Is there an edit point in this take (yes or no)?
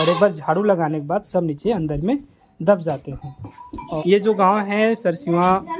yes